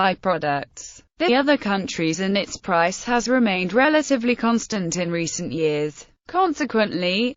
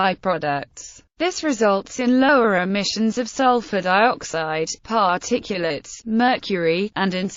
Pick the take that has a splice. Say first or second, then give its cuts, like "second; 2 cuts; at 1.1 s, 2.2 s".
second; 1 cut; at 1.3 s